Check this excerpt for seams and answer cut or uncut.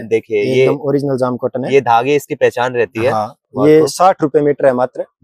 uncut